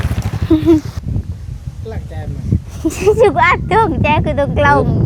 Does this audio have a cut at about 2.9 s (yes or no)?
no